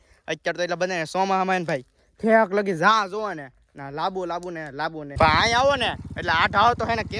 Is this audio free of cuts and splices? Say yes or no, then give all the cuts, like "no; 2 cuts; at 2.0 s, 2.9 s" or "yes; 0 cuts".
no; 1 cut; at 5.1 s